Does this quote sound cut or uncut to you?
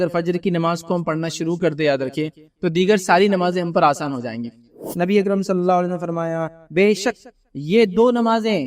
cut